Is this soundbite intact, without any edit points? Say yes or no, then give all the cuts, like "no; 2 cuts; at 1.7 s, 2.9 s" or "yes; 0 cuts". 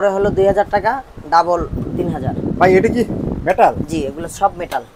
yes; 0 cuts